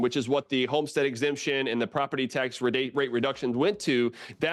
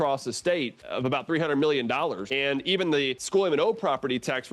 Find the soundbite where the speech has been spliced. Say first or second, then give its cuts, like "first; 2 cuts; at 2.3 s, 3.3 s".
second; 2 cuts; at 2.3 s, 3.2 s